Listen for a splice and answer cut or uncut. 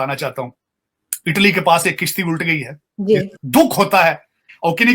cut